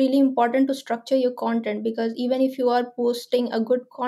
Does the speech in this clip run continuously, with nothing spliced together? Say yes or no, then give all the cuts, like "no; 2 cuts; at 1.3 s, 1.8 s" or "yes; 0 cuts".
yes; 0 cuts